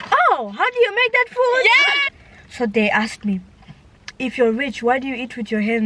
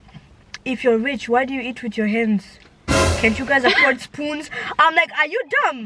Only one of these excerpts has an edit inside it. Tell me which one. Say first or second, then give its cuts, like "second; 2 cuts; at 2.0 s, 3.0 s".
first; 1 cut; at 2.0 s